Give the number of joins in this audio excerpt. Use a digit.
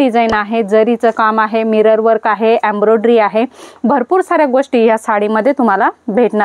0